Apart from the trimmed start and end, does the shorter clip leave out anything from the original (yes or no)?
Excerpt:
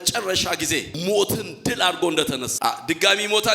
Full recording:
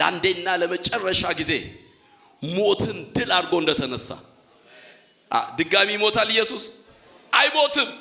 yes